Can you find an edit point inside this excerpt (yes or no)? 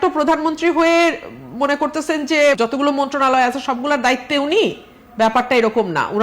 yes